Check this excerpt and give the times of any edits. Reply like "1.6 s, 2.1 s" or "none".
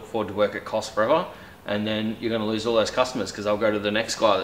none